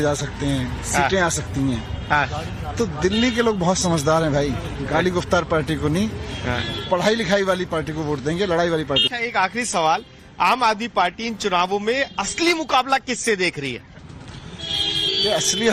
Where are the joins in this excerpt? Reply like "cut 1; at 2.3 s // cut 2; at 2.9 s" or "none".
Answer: none